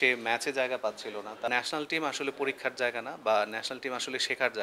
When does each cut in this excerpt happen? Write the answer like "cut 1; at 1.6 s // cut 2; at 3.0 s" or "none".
cut 1; at 1.5 s